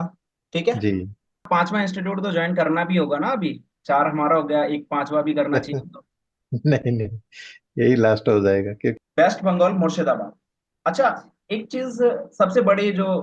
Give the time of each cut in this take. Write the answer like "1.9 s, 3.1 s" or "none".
1.4 s, 9.0 s